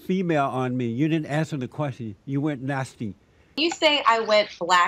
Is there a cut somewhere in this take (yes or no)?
yes